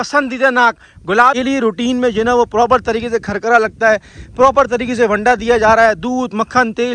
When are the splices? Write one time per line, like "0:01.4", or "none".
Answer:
0:01.4

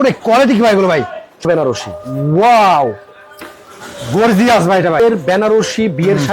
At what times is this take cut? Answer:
0:01.4
0:05.0

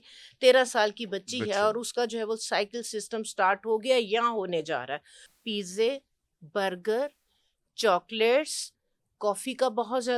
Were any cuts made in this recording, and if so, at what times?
0:05.2

